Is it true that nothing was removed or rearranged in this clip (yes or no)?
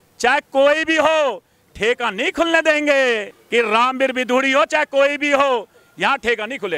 no